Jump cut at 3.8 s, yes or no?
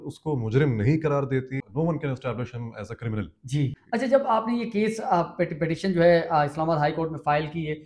yes